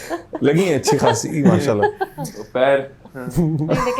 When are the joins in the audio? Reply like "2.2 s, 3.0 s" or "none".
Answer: none

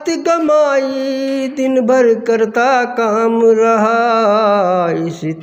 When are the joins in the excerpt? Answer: none

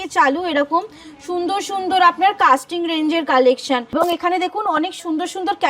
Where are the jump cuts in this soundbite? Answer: 3.9 s

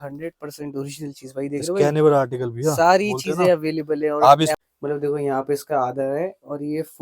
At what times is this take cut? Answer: 4.5 s

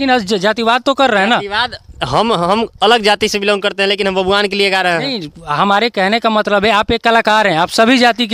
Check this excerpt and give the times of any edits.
none

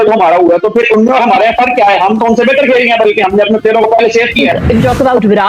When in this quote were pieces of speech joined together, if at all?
4.5 s

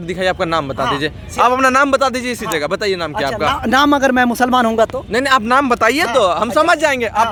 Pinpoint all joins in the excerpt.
none

